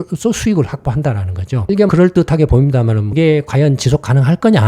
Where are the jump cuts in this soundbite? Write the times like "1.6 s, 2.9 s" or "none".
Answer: 3.0 s